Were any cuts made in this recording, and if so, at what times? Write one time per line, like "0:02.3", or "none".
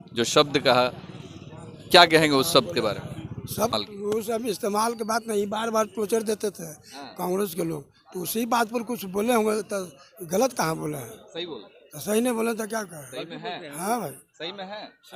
none